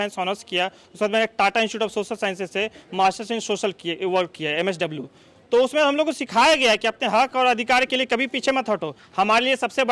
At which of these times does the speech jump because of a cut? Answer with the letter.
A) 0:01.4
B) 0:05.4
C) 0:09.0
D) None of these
C